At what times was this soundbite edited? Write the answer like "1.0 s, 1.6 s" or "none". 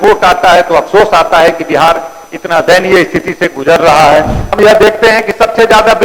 4.4 s